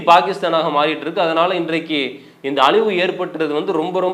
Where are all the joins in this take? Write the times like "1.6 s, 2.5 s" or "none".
none